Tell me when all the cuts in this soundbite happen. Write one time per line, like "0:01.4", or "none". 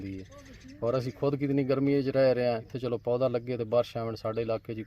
0:02.7